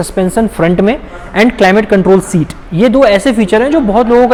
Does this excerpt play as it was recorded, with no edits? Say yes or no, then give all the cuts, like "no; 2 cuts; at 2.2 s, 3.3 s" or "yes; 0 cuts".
yes; 0 cuts